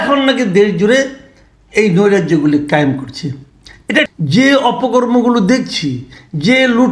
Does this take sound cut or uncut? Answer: cut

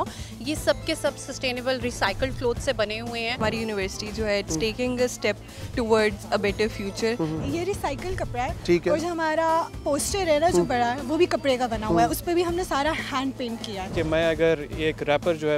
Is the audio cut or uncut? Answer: cut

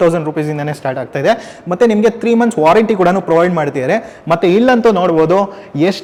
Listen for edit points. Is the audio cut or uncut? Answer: uncut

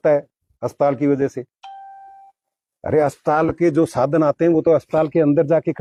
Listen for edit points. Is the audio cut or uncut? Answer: uncut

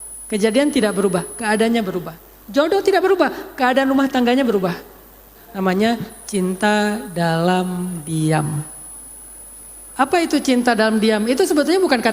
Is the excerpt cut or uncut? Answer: cut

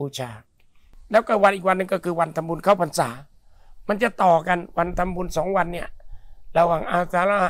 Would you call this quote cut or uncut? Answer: cut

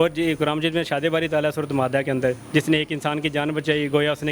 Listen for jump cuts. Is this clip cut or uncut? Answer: uncut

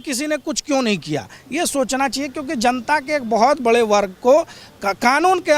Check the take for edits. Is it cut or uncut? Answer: uncut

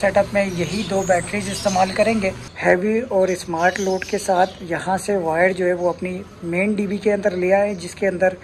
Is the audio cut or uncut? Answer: cut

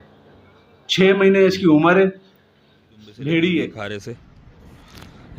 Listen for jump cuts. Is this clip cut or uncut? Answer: cut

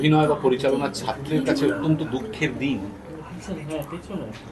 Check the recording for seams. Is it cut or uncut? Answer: uncut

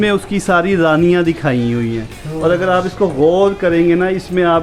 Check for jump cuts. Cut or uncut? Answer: uncut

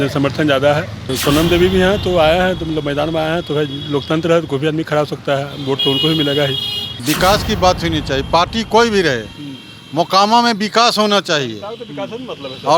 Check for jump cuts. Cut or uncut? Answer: cut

